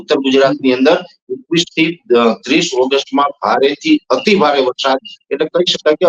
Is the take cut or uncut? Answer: uncut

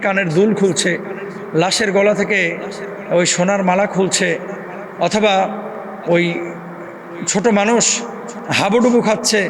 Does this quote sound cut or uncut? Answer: uncut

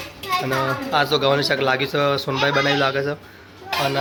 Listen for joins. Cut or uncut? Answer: uncut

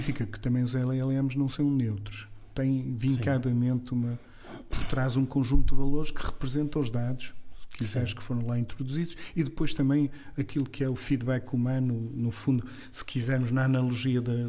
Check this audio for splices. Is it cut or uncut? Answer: uncut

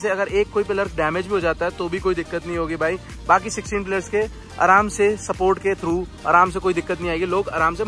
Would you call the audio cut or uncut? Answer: uncut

